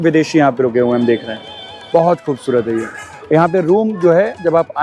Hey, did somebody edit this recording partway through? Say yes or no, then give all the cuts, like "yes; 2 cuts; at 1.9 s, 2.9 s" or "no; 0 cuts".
no; 0 cuts